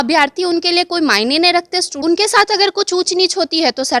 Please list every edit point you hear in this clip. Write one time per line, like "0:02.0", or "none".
0:02.0